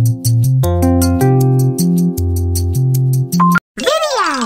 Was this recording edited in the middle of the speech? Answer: yes; 1 cut; at 3.6 s

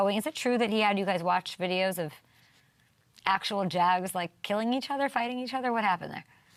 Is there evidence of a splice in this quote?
no; 0 cuts

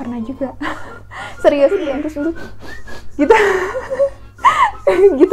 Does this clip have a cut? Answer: yes; 1 cut; at 1.8 s

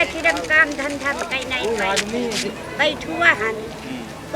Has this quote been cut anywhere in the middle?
no; 0 cuts

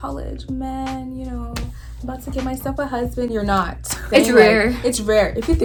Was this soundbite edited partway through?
no; 0 cuts

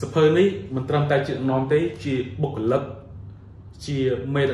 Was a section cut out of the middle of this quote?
no; 0 cuts

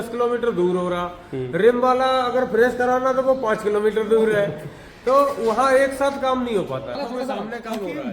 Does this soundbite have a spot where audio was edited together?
yes; 1 cut; at 7.0 s

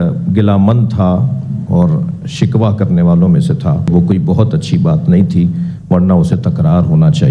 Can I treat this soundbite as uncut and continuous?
no; 1 cut; at 3.9 s

